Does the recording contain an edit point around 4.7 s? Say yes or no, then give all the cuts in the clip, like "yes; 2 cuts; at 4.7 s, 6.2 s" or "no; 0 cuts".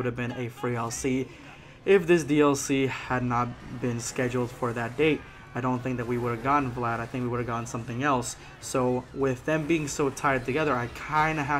yes; 1 cut; at 4.7 s